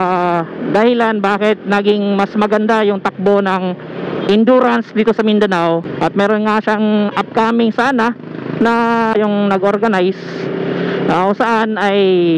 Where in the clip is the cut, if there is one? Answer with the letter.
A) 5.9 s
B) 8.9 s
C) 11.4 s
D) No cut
A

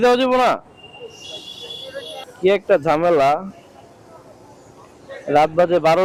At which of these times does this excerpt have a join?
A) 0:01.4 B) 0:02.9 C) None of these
C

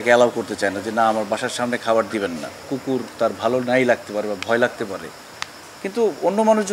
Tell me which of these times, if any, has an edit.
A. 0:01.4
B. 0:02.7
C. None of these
B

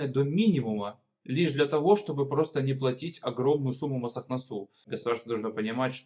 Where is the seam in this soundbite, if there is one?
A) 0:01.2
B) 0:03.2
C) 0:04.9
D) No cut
C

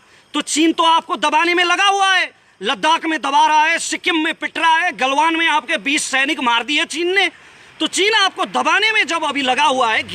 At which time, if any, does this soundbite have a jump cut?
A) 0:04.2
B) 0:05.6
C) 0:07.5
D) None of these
D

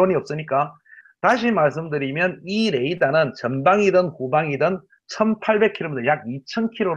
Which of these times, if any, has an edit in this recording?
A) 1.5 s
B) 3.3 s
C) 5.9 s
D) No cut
A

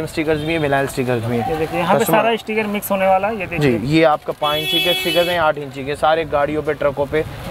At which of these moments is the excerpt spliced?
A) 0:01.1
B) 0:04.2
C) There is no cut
C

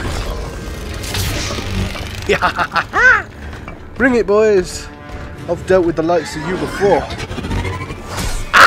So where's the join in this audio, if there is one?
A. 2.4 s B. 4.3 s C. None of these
C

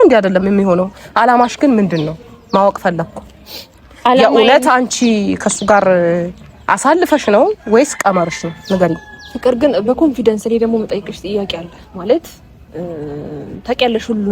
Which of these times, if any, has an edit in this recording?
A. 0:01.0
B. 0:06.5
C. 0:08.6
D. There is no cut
A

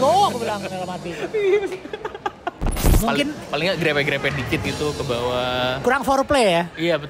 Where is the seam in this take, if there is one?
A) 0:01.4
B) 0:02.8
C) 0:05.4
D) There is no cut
B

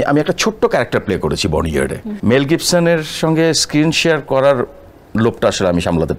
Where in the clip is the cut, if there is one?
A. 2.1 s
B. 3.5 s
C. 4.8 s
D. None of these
A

